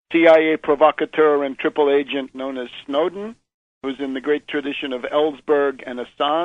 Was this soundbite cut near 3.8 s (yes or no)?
no